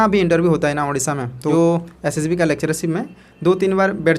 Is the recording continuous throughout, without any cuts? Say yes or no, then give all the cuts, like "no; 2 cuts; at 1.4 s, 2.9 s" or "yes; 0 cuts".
no; 1 cut; at 1.4 s